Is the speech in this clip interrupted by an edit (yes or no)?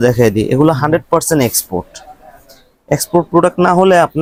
no